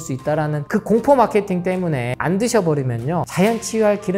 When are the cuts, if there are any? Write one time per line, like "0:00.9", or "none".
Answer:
0:02.1
0:03.3